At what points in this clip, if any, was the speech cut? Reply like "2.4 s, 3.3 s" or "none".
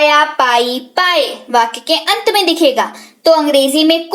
none